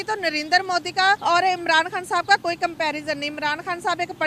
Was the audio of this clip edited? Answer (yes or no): yes